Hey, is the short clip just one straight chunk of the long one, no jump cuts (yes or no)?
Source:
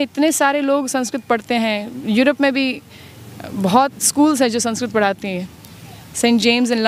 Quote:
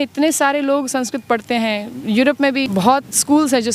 no